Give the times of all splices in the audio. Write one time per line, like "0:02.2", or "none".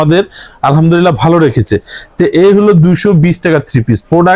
none